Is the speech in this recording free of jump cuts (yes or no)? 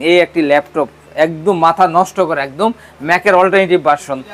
yes